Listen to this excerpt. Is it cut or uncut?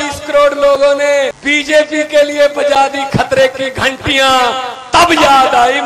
cut